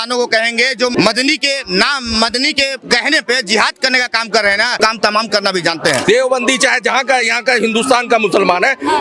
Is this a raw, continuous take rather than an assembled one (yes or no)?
no